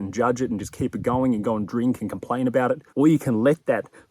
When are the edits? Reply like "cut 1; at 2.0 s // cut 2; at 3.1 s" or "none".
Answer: cut 1; at 2.9 s